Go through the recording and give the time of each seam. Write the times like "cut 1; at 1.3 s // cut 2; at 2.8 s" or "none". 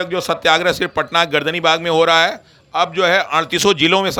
none